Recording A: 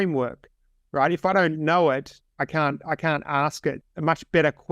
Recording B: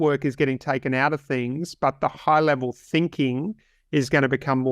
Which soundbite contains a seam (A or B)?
A